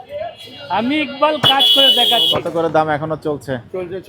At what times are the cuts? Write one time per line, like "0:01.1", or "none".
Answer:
0:02.3

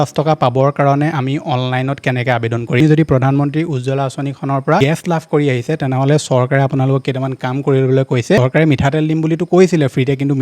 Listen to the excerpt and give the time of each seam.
0:02.8
0:04.8
0:08.4

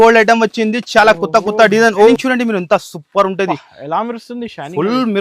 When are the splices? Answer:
0:02.1

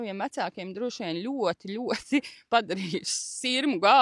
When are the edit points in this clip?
none

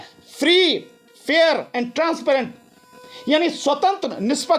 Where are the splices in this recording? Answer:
none

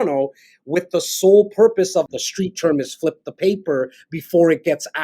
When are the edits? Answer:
0:02.1

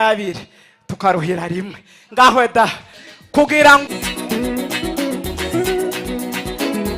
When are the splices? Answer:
0:03.8

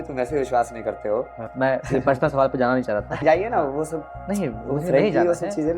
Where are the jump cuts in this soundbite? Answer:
0:01.5
0:03.2

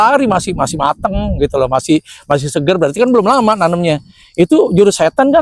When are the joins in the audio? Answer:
none

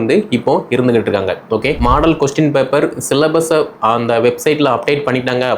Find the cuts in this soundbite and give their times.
0:01.8

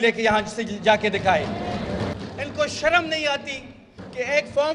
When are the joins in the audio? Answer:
0:02.2

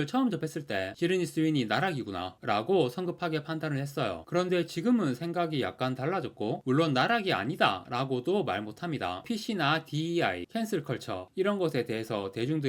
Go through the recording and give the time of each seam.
0:09.2

